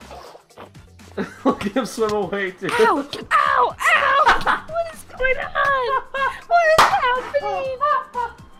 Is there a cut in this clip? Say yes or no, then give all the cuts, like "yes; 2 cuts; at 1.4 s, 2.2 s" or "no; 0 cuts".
no; 0 cuts